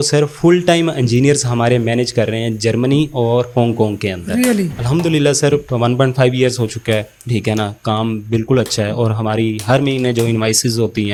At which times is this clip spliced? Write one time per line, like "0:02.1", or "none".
none